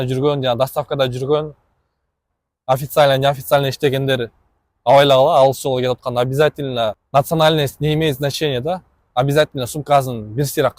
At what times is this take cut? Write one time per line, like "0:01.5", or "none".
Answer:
0:07.0